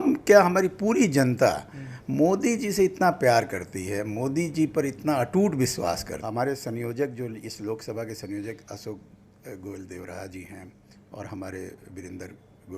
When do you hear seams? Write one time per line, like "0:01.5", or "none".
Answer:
0:06.1